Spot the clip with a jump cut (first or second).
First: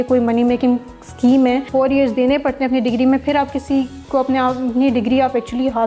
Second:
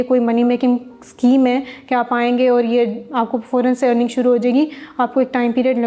first